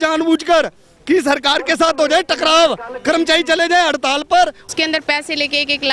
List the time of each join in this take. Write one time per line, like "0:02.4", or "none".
0:04.6